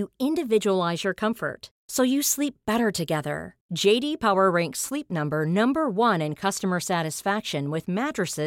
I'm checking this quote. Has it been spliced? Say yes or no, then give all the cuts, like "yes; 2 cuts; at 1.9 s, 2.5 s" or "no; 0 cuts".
no; 0 cuts